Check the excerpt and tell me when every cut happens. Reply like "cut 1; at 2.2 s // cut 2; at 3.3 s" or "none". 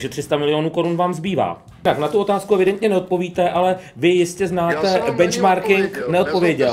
cut 1; at 1.8 s